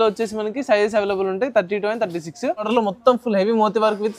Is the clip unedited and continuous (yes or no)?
no